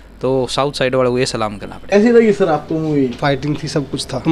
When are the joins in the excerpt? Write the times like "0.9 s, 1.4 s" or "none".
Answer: 1.9 s, 3.5 s